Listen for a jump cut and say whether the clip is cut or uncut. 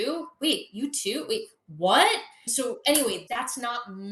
uncut